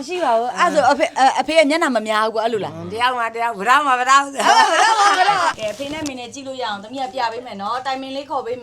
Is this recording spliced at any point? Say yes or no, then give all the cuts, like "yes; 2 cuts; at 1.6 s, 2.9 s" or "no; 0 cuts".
yes; 1 cut; at 5.5 s